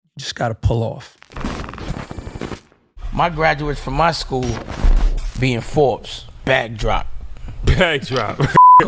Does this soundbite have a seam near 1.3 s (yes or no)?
yes